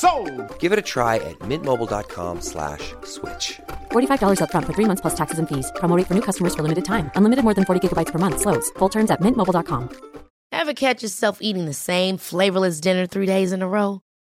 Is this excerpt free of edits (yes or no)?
no